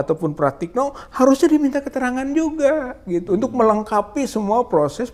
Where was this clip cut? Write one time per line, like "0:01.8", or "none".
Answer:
none